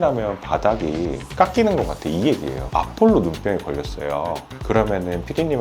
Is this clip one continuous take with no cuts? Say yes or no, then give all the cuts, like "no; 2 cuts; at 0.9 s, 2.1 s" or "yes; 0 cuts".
no; 1 cut; at 2.6 s